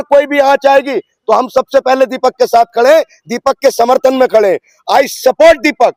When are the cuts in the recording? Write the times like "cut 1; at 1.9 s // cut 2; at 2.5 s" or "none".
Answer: none